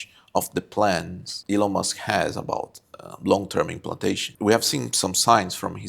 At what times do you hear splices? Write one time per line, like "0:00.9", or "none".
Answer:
0:01.3
0:04.3